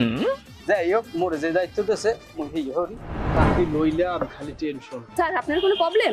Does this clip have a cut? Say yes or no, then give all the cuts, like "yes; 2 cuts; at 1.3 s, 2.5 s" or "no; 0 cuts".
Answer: yes; 1 cut; at 3.3 s